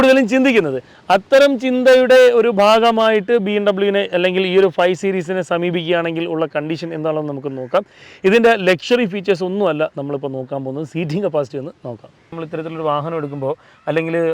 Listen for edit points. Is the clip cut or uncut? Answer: cut